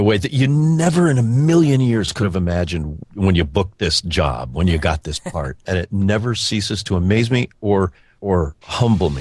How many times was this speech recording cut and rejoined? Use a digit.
3